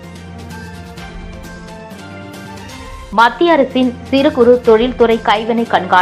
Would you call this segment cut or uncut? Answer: cut